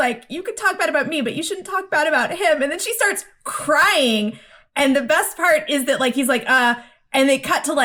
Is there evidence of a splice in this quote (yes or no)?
no